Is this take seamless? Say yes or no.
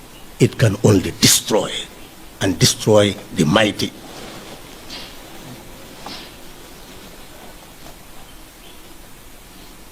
yes